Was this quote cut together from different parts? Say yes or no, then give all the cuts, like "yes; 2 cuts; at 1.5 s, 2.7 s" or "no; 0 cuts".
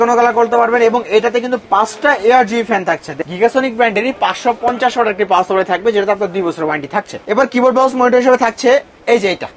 yes; 2 cuts; at 3.1 s, 7.2 s